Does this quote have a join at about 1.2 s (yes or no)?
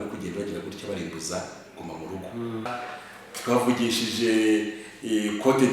no